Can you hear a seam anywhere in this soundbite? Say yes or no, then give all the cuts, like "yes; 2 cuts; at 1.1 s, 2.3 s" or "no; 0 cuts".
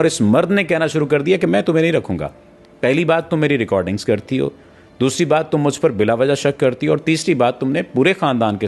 no; 0 cuts